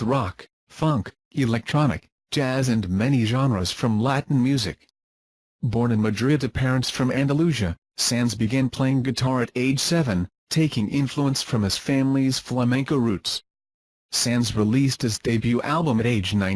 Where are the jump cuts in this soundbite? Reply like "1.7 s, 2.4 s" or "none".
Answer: 12.5 s